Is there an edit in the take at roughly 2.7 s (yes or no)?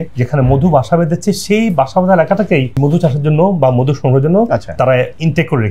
yes